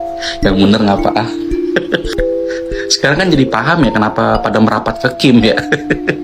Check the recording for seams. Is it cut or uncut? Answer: cut